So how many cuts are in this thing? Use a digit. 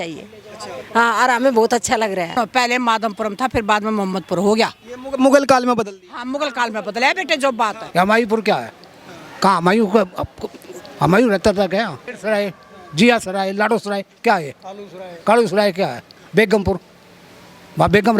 3